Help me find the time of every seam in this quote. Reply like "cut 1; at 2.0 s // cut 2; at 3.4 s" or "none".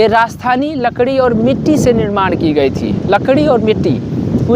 none

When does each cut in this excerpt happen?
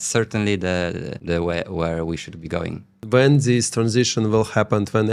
cut 1; at 1.1 s // cut 2; at 3.0 s

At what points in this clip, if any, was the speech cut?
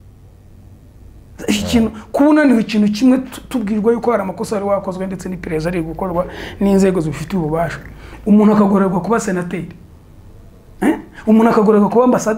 none

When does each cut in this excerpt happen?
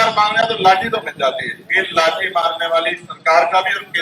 none

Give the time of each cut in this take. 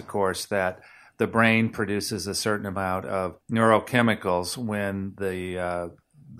cut 1; at 3.4 s

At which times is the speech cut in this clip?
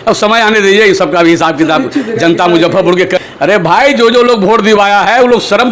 cut 1; at 3.1 s

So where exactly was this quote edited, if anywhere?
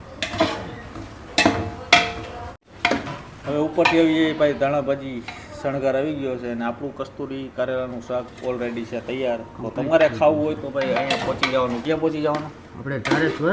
cut 1; at 2.7 s

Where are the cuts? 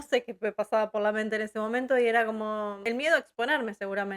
cut 1; at 2.8 s

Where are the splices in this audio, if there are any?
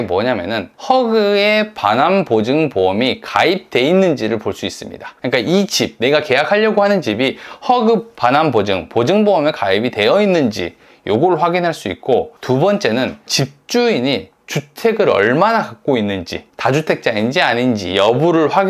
none

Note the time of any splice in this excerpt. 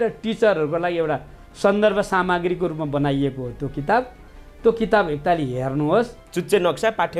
cut 1; at 6.2 s

